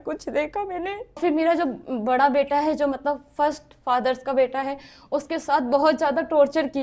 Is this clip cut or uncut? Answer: cut